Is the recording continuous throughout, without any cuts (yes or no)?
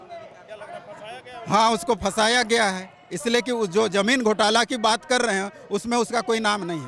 yes